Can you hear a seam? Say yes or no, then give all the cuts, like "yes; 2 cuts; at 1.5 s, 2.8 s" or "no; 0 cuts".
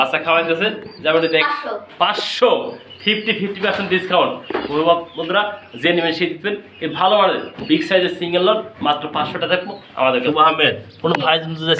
yes; 2 cuts; at 1.5 s, 10.2 s